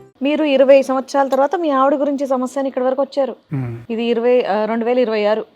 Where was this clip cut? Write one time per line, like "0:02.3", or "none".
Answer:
none